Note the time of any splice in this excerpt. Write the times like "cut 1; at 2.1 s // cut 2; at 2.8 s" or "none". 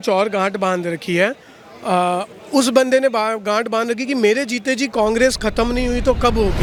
none